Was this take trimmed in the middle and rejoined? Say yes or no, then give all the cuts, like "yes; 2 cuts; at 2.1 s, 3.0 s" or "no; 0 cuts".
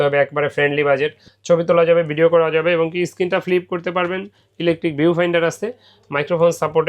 yes; 1 cut; at 1.3 s